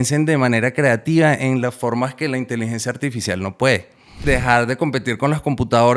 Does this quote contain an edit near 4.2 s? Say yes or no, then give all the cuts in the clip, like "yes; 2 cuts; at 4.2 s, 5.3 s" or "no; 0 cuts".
yes; 1 cut; at 4.2 s